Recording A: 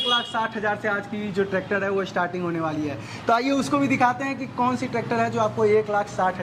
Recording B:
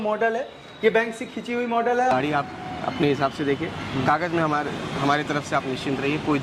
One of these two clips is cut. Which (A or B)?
B